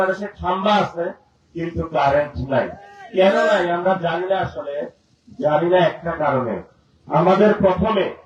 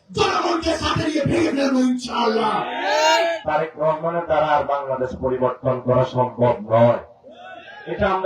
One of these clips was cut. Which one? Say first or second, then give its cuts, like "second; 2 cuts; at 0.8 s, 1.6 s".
second; 1 cut; at 3.4 s